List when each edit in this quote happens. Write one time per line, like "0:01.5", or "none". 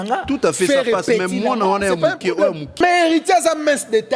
0:02.8